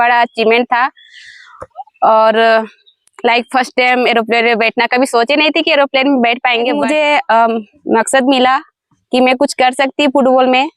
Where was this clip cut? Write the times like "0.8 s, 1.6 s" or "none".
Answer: 6.8 s